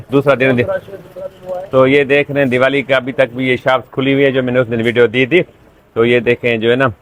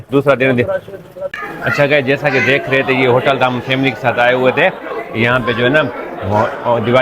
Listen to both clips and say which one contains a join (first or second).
second